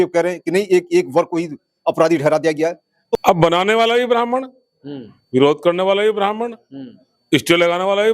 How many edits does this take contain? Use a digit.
1